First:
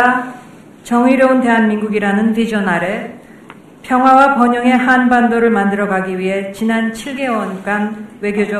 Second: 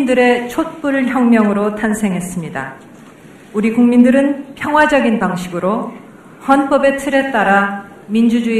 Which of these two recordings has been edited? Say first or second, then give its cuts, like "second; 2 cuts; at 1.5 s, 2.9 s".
second; 1 cut; at 2.2 s